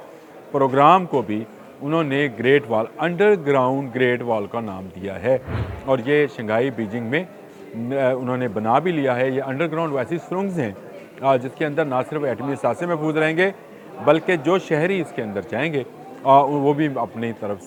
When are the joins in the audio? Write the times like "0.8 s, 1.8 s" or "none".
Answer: none